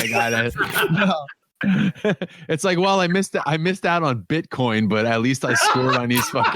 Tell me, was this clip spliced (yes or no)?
yes